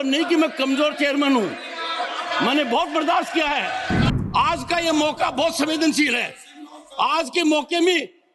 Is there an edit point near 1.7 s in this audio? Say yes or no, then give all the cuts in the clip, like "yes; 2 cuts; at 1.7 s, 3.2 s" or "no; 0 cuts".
no; 1 cut; at 4.1 s